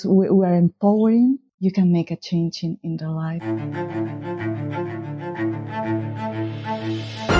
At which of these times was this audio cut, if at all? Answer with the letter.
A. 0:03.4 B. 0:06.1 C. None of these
A